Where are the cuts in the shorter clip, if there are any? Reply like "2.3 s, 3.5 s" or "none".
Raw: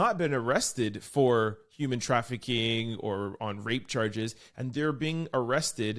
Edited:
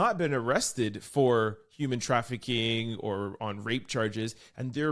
none